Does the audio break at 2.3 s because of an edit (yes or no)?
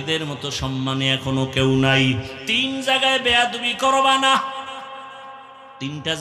yes